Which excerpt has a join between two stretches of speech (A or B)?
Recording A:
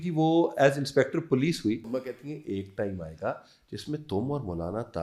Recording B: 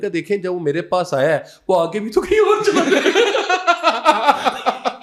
A